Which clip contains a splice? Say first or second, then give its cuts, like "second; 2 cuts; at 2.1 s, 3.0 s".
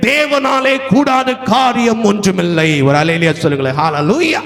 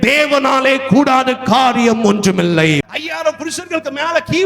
second; 1 cut; at 2.8 s